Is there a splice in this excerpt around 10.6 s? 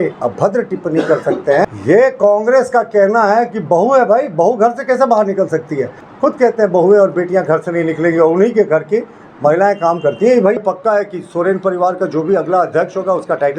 yes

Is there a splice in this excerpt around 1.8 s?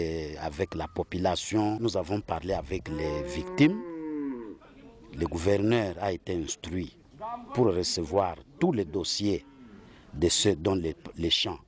yes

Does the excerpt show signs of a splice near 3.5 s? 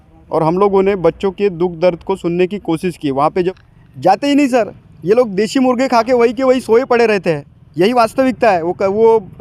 yes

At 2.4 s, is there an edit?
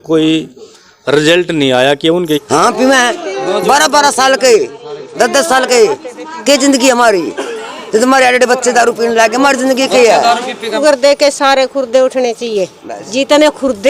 yes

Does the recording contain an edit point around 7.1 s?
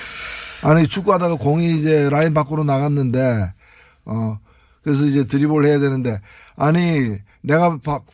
no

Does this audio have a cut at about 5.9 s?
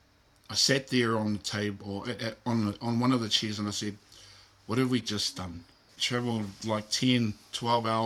yes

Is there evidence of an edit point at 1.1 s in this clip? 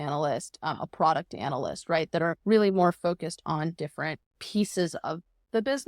no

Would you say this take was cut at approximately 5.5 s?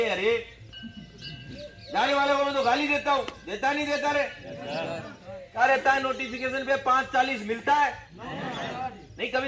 yes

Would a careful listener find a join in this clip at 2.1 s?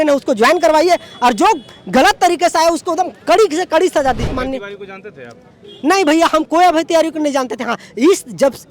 no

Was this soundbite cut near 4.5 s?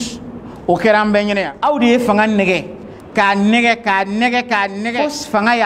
yes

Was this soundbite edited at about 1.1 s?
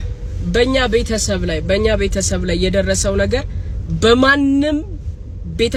no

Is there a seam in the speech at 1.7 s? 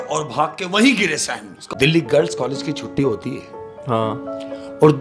yes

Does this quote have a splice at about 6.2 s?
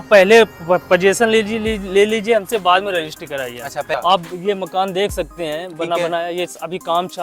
no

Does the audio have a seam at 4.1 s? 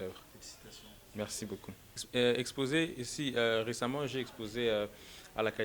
no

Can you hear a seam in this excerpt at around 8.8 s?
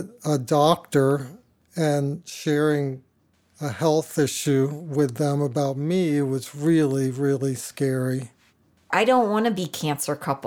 yes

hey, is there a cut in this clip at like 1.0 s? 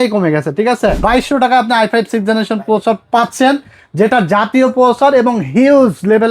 yes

